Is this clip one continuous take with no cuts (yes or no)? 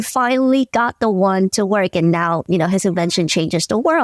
no